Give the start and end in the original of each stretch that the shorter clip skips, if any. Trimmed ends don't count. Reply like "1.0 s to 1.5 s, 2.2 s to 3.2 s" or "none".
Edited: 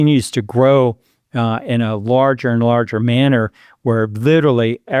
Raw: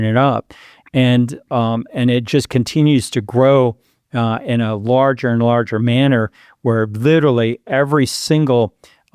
none